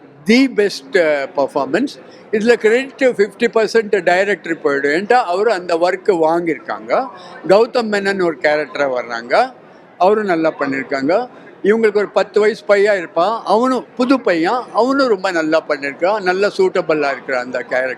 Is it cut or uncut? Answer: uncut